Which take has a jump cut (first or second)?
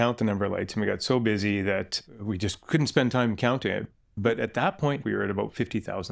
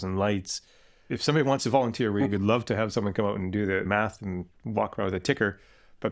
first